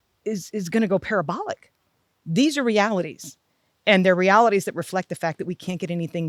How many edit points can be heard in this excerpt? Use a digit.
0